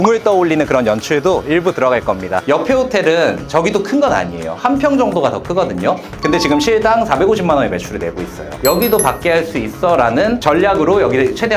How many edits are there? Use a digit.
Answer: 2